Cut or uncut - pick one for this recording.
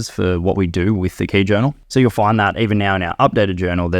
cut